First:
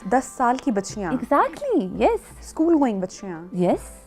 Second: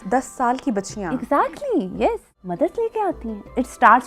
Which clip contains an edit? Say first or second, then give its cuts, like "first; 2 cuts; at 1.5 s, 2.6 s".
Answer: second; 1 cut; at 2.4 s